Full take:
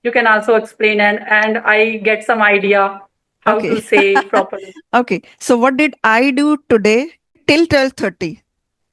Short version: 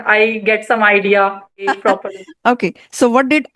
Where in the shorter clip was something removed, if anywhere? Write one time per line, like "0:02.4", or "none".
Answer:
0:01.7